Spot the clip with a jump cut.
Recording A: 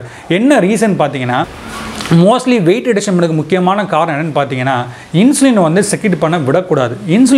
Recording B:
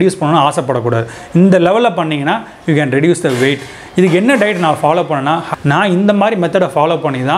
B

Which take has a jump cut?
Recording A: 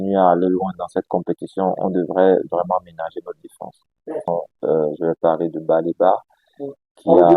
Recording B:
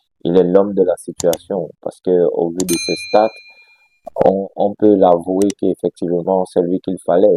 A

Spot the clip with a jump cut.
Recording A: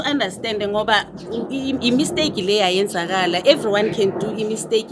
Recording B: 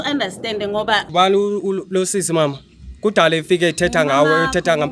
B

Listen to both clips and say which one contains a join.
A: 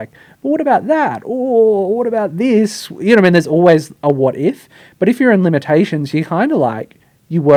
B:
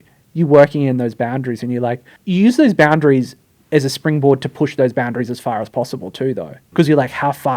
B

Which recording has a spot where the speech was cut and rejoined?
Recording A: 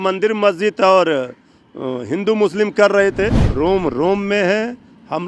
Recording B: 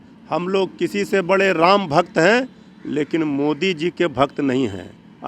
A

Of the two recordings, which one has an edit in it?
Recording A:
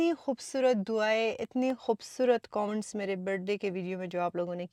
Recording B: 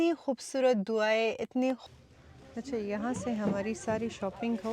B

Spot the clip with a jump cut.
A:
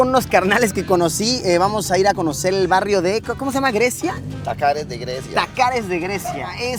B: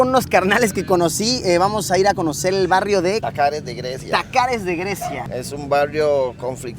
B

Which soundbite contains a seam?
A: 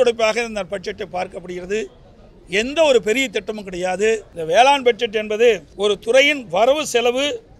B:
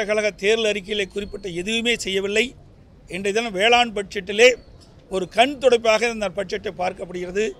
A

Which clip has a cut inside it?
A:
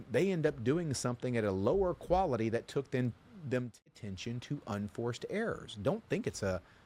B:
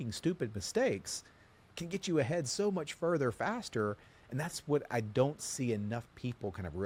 A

